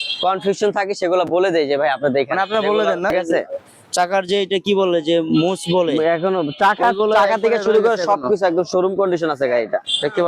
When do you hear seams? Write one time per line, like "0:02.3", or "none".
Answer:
0:03.1